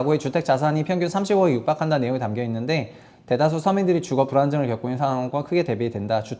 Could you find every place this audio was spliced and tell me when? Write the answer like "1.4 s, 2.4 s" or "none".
none